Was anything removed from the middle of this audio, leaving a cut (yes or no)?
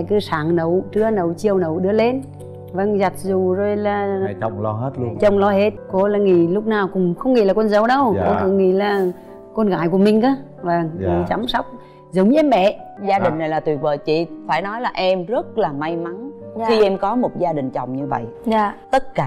yes